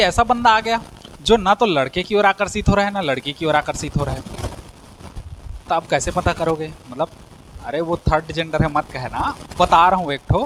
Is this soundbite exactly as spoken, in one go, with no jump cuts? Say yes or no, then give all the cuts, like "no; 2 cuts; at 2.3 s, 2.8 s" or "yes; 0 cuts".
yes; 0 cuts